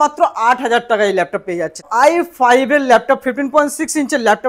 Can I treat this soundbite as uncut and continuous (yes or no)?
no